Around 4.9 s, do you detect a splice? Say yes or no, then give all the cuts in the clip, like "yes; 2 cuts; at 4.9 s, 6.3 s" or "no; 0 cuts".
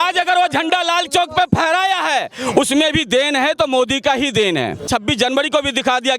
yes; 1 cut; at 4.9 s